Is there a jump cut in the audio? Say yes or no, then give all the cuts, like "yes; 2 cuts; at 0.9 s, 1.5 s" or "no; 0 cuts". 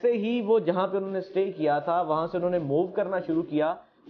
no; 0 cuts